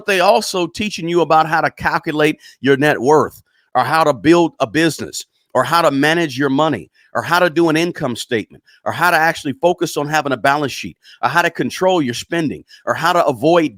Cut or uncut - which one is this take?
uncut